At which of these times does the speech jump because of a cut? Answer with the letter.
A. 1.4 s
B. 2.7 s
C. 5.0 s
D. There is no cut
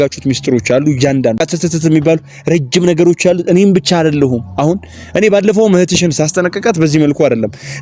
A